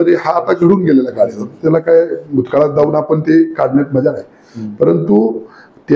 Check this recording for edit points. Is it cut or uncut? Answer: uncut